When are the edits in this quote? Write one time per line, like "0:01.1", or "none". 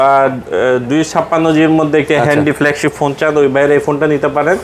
none

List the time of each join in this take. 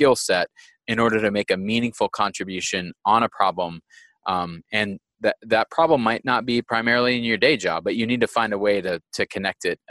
none

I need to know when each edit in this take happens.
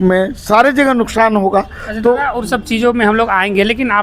none

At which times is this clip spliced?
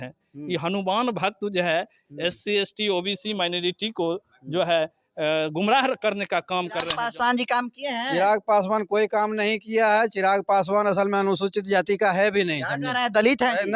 0:06.9

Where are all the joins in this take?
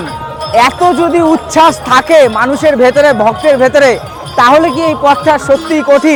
none

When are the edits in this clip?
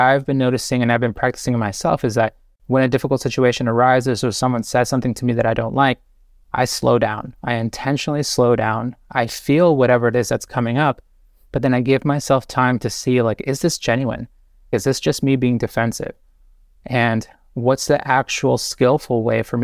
0:02.5

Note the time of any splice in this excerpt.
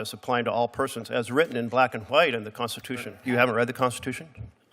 0:03.1

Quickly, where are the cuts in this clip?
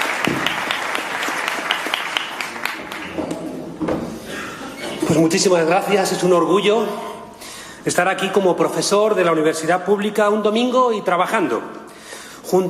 none

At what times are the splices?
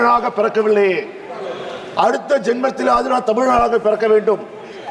none

